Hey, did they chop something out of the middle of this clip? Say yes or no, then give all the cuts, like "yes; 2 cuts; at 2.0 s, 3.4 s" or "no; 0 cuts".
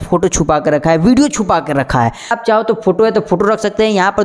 yes; 1 cut; at 2.4 s